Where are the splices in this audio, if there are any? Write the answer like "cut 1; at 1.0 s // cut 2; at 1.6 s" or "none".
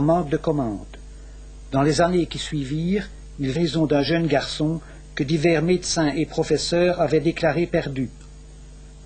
none